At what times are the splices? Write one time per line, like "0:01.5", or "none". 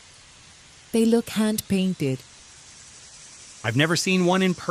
0:00.9